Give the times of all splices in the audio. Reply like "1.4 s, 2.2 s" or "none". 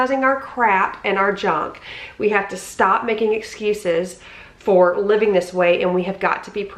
none